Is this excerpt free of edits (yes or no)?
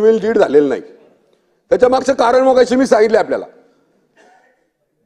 yes